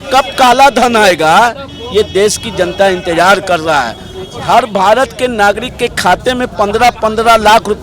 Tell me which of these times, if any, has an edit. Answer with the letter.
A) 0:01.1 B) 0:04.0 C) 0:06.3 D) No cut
D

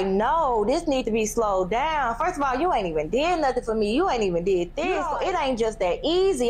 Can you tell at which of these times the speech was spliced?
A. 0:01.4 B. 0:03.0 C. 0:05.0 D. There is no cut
C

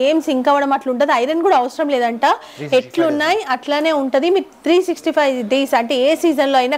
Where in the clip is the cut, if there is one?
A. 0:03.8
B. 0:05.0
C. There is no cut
C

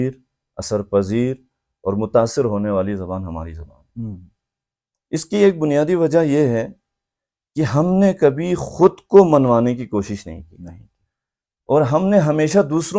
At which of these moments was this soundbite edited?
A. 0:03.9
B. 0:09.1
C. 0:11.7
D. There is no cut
D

